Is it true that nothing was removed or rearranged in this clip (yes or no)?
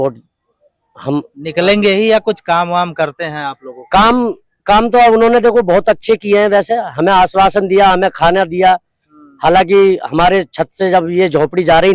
yes